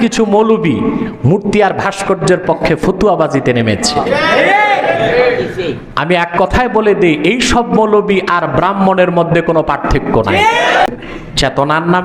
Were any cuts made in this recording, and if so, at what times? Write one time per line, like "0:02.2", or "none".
0:10.9